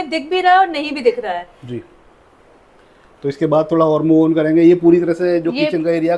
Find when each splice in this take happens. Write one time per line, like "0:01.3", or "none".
none